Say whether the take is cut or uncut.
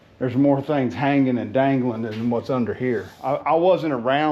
cut